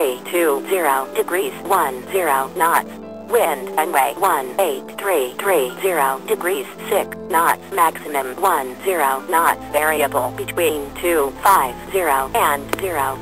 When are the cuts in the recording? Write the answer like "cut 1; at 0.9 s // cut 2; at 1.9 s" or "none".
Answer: cut 1; at 2.9 s